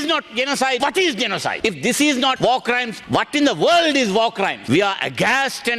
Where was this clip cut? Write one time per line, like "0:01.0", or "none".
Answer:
0:01.0
0:02.7
0:04.6